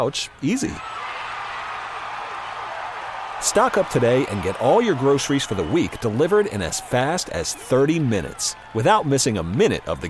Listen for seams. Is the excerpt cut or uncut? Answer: uncut